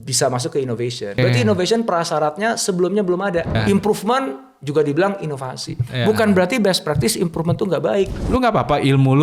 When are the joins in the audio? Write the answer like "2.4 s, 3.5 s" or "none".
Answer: 1.2 s, 3.6 s, 8.2 s